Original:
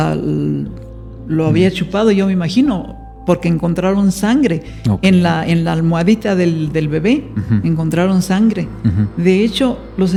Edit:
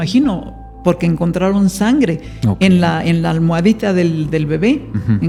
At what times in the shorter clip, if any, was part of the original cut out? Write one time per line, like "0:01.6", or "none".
none